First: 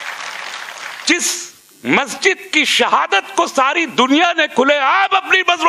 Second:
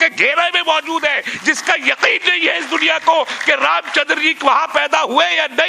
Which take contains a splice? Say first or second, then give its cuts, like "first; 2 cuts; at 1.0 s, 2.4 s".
first; 1 cut; at 1.0 s